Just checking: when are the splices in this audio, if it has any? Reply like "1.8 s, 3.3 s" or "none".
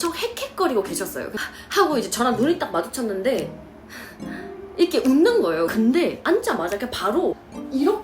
1.3 s, 5.7 s